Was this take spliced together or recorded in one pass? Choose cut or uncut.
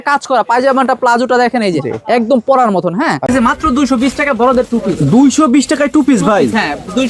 cut